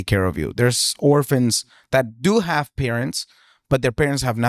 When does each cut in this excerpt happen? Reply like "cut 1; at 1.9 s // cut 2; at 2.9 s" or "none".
none